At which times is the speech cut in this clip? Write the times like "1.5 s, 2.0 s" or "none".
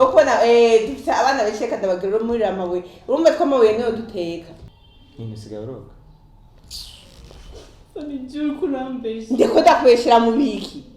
4.6 s